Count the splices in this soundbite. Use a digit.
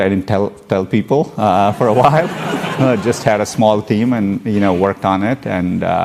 0